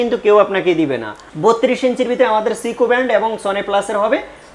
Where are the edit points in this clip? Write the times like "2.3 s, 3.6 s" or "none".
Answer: 1.3 s